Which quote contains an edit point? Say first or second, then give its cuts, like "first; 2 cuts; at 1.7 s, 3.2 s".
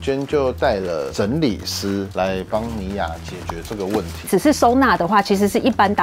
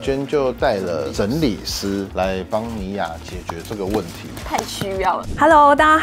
first; 1 cut; at 4.2 s